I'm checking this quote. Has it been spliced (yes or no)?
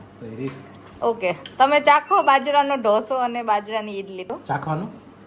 yes